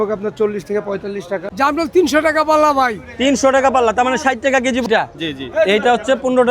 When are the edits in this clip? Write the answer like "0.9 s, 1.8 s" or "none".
1.5 s, 4.9 s